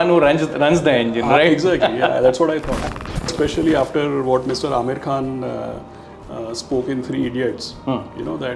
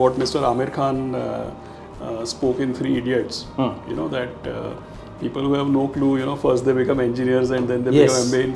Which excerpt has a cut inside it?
first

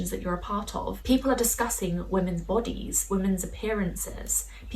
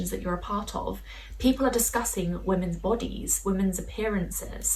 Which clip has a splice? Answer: first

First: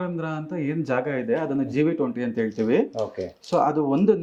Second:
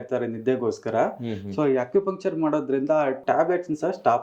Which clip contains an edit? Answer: second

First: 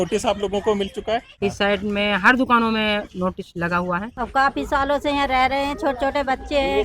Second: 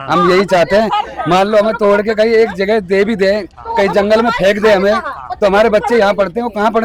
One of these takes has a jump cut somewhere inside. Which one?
first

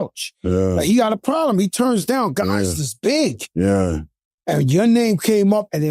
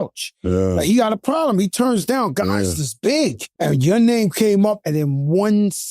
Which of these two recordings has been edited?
second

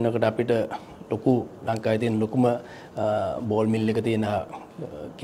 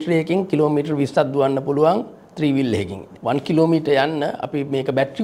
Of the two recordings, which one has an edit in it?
second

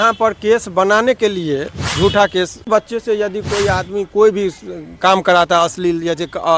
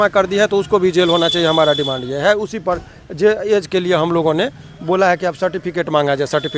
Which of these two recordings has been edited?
first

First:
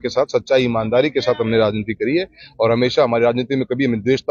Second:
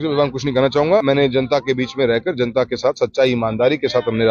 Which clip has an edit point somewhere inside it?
second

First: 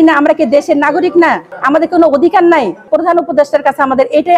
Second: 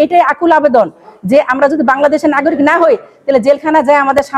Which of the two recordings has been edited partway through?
first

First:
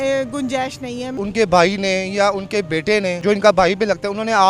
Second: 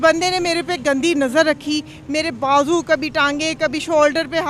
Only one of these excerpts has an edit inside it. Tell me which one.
first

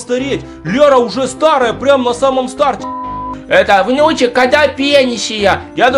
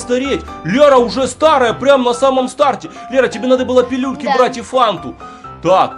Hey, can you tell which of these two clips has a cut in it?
first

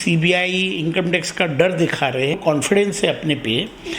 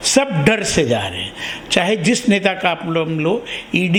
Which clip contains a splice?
first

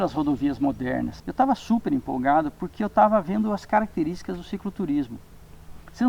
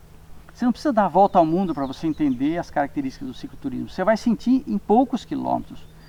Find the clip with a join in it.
first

